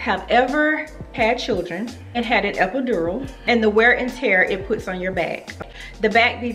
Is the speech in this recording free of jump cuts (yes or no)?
no